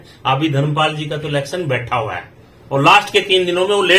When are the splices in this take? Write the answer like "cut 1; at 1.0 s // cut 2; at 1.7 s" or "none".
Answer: none